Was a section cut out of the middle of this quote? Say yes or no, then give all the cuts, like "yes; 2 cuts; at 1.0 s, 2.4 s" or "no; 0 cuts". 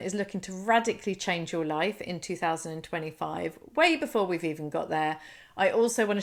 no; 0 cuts